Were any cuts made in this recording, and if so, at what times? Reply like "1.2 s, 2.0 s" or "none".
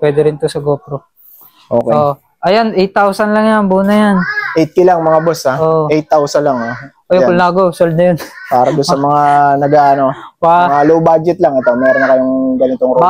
1.8 s